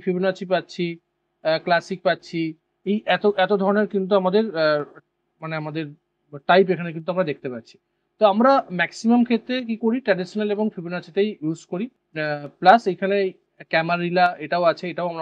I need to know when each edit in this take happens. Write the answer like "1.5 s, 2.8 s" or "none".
none